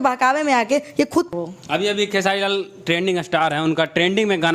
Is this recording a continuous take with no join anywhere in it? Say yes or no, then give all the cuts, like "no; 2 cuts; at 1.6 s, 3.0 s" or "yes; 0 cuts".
no; 1 cut; at 1.3 s